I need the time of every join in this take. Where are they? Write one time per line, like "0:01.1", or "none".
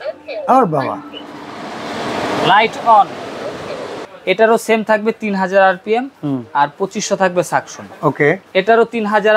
0:04.1